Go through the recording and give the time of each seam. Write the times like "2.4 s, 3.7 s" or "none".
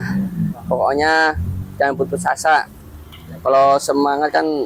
none